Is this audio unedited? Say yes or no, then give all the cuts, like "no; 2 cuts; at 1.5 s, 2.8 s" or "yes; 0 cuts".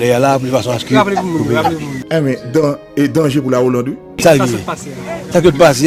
yes; 0 cuts